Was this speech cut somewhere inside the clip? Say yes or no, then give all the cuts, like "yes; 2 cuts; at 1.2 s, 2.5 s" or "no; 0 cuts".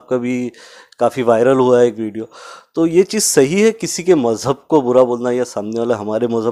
no; 0 cuts